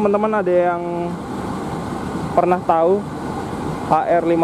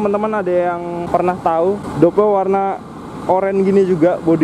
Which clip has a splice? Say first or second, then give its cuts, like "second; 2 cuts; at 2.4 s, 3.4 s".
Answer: second; 2 cuts; at 1.1 s, 1.9 s